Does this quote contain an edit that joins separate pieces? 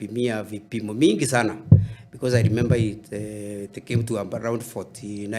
no; 0 cuts

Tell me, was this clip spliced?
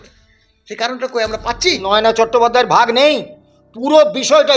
yes; 1 cut; at 1.8 s

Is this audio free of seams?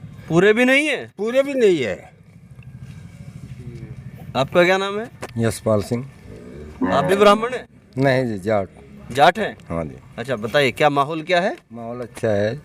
yes; 0 cuts

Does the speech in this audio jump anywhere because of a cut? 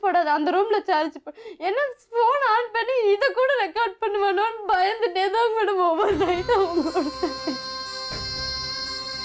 no; 0 cuts

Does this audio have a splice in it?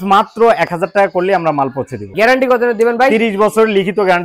no; 0 cuts

